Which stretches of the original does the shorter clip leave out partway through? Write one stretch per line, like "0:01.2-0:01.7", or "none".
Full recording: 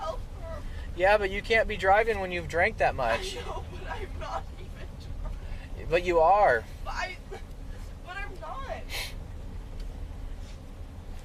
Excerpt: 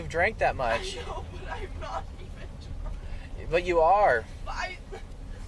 none